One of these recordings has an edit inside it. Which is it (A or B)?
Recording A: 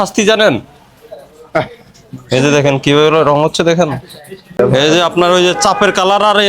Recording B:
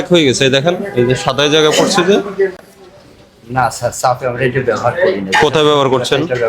A